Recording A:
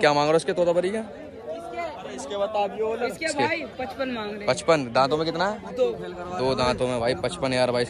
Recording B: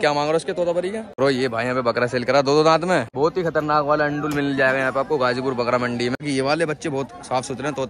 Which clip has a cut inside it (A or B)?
B